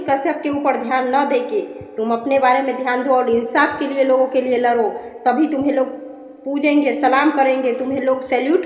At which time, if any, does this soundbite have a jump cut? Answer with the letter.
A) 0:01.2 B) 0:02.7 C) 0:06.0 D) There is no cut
D